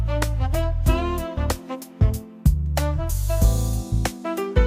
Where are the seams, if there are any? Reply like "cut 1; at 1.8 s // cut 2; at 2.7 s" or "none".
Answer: none